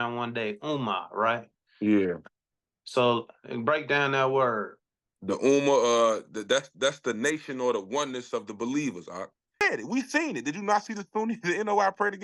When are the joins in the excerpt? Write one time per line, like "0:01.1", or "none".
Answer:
0:09.6